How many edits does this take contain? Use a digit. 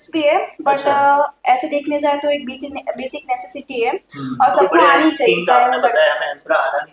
1